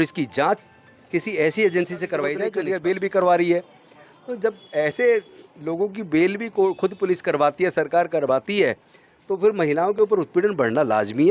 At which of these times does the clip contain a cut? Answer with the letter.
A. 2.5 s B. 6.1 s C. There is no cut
A